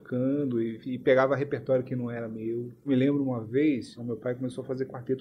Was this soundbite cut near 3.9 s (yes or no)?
yes